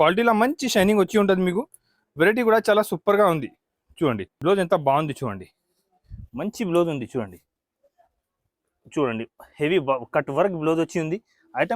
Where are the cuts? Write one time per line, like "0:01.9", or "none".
0:04.3